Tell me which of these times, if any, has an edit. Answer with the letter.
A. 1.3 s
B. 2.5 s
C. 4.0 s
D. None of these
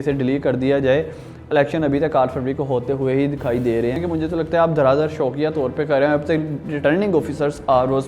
C